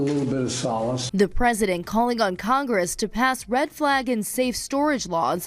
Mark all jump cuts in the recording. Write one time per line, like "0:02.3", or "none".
0:01.1